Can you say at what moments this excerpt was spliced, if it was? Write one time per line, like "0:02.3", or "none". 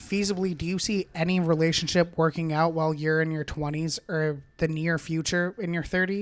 none

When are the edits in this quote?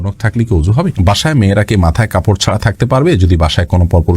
0:00.9

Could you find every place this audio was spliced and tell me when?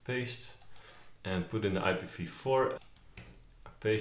0:02.8

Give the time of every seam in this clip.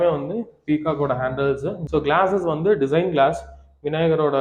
0:01.8

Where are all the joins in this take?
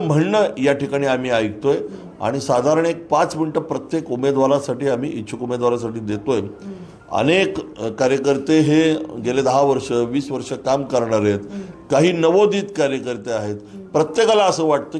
none

